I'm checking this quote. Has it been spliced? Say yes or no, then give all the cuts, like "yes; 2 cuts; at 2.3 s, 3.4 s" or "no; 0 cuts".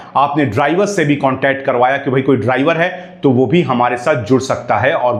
no; 0 cuts